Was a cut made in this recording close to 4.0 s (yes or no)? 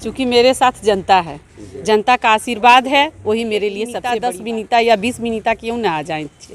yes